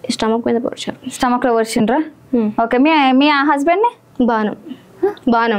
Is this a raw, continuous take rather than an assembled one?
yes; 0 cuts

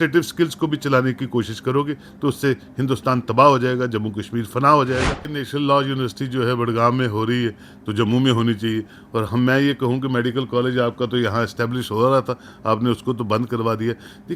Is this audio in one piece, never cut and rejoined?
no; 1 cut; at 5.3 s

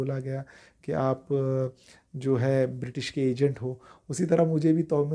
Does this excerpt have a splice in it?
no; 0 cuts

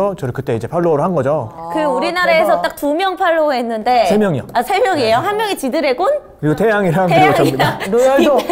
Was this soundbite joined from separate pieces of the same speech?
no; 0 cuts

